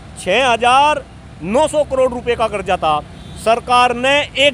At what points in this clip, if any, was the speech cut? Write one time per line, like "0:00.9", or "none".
none